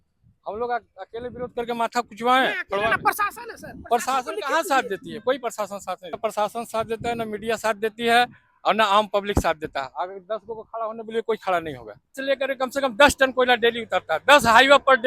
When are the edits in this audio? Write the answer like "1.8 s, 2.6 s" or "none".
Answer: 6.2 s, 12.2 s

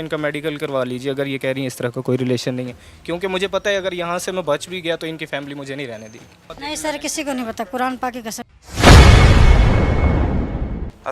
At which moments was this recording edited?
6.4 s

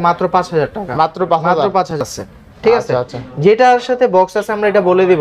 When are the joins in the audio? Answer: 2.0 s

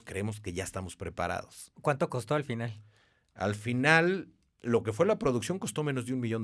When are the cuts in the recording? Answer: 1.7 s

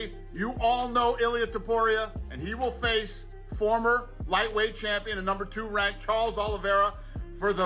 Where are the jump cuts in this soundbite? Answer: 2.2 s

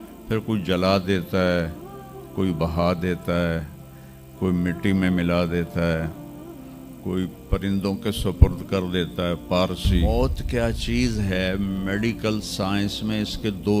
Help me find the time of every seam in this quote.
10.0 s

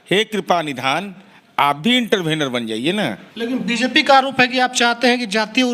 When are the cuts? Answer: 3.3 s

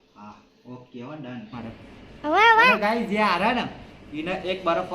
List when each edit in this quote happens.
1.5 s

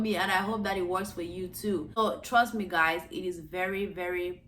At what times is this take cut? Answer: 1.9 s

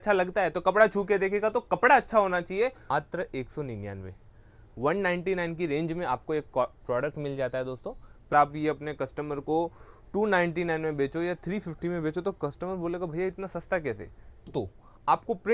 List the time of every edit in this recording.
2.8 s, 8.3 s, 14.5 s

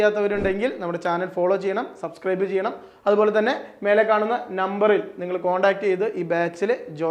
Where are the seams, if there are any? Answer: none

